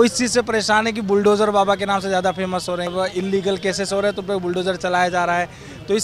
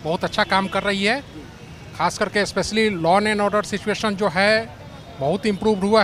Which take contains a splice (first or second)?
first